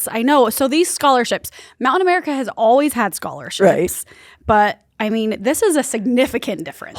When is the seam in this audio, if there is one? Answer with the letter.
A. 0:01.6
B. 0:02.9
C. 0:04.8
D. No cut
D